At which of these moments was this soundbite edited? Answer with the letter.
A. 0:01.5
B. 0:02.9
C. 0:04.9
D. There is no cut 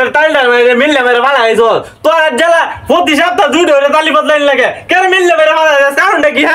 D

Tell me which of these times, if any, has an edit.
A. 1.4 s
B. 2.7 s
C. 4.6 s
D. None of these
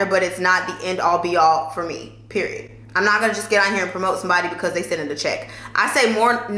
D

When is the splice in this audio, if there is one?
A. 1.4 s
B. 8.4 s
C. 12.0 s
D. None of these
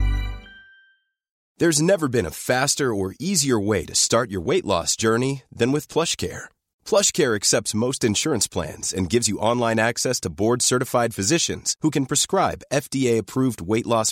A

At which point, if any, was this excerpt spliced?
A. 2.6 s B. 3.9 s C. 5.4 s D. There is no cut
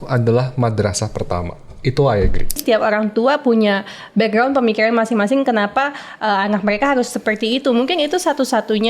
A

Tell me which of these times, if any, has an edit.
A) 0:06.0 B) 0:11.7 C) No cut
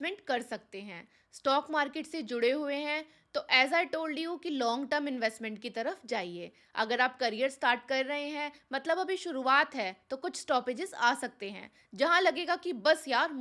C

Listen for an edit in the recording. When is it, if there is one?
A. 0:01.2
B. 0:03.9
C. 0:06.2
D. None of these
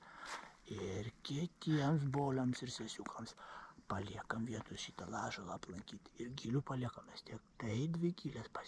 D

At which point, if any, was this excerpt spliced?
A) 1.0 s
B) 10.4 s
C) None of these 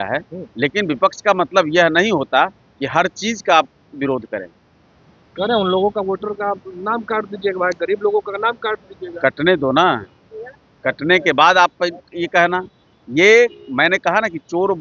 C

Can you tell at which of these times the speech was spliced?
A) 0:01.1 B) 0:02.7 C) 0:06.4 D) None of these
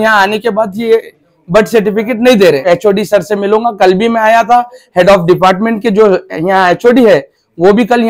B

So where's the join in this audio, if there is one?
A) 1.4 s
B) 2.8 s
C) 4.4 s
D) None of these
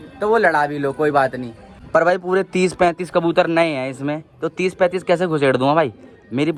D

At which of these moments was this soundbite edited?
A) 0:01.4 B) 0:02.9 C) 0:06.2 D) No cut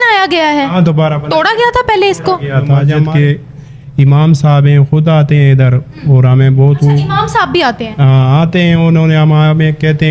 B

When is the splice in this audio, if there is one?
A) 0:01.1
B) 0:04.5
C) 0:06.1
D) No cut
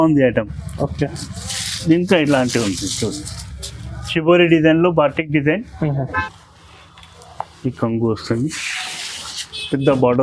C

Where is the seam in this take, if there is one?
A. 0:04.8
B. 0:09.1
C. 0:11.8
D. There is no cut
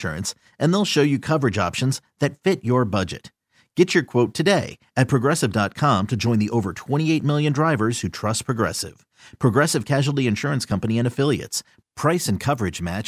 D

